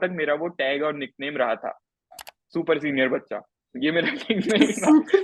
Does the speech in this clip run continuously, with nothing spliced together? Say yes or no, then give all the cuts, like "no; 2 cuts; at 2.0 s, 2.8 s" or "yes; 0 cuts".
yes; 0 cuts